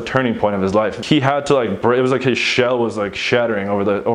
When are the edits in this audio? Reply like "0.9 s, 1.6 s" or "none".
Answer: 1.0 s